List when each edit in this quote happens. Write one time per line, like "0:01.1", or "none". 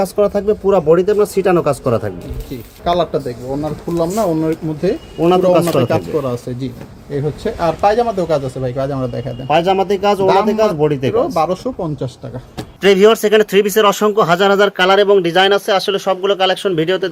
none